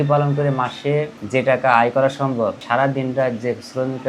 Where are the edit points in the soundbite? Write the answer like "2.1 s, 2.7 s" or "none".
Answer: 1.2 s, 2.6 s